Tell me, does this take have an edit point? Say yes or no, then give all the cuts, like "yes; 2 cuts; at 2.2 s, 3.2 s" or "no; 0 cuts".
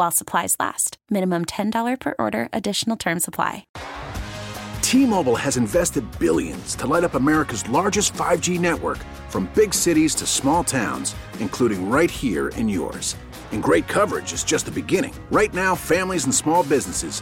yes; 1 cut; at 3.7 s